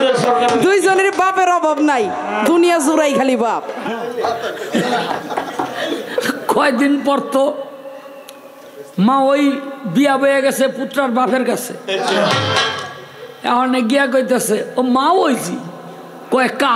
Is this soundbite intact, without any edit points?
no; 1 cut; at 3.7 s

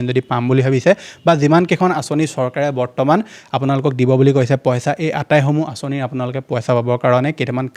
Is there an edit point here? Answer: no; 0 cuts

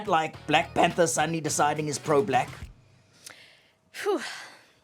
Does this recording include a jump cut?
no; 0 cuts

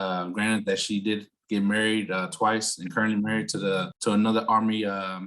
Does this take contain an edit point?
yes; 1 cut; at 3.9 s

